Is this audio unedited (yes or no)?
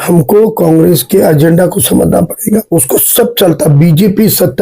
no